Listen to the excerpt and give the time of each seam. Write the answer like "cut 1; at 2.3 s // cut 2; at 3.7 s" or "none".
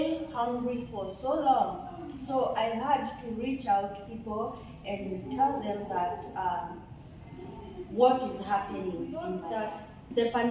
cut 1; at 9.4 s